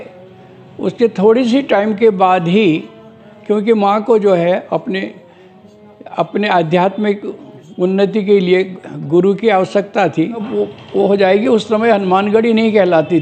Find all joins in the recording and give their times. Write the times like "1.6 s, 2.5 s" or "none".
10.5 s